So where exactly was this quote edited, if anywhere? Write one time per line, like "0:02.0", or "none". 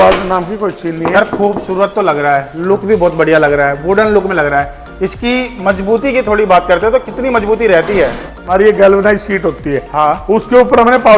0:08.5